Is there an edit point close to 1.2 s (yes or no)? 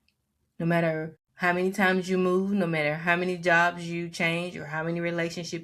yes